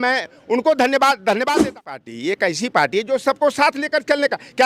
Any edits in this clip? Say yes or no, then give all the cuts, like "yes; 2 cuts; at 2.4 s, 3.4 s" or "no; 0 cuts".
yes; 1 cut; at 1.7 s